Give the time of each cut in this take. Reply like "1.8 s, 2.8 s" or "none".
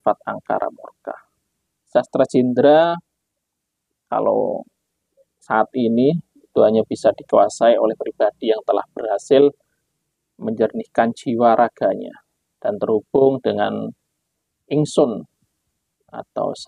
1.9 s